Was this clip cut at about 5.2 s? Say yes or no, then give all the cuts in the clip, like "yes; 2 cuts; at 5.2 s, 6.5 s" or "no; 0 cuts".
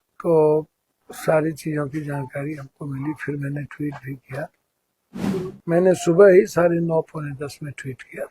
yes; 1 cut; at 5.2 s